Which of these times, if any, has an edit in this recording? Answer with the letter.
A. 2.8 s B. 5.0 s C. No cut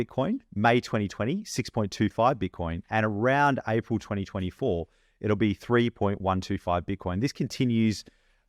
C